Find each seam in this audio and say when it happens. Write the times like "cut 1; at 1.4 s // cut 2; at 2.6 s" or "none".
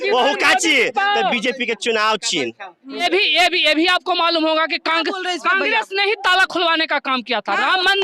cut 1; at 3.0 s